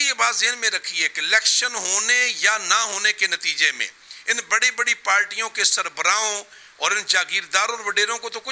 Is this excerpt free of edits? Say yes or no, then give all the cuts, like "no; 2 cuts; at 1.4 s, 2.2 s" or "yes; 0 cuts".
yes; 0 cuts